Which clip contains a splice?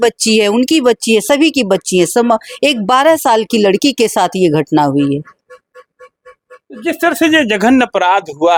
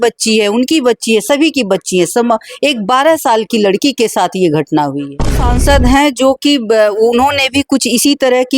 second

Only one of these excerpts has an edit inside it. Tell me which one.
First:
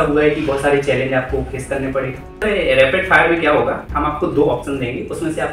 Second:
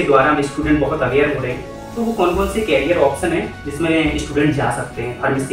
first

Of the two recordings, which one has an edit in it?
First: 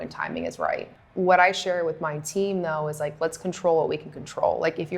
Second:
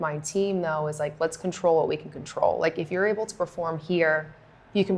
first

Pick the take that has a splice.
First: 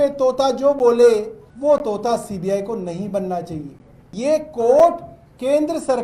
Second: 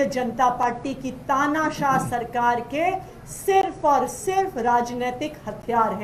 first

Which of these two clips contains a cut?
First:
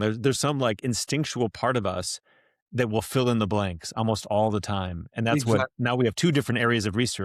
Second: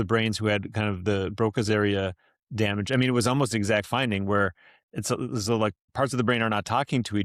second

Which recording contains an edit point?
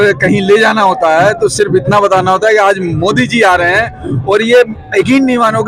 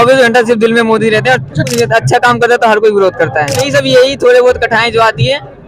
second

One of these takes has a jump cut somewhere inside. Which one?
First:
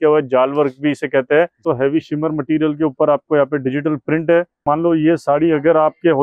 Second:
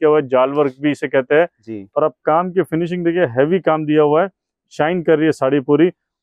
first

